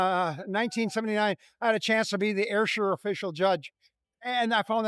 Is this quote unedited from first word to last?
yes; 0 cuts

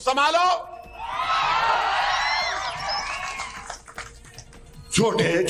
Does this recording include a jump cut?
no; 0 cuts

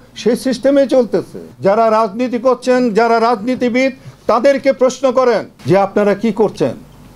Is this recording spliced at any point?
yes; 2 cuts; at 1.5 s, 5.5 s

